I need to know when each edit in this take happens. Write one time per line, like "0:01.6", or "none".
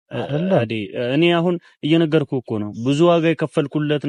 none

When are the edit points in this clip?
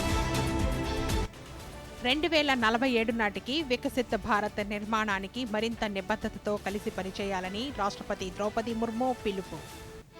0:01.7

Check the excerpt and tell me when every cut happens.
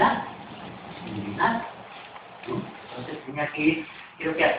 0:00.9

